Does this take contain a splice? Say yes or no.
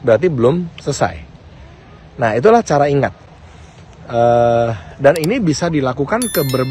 no